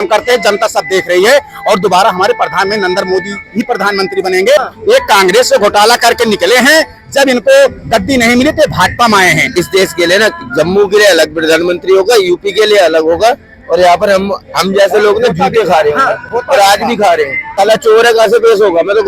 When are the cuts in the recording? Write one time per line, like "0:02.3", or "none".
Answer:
0:04.6
0:09.5
0:17.5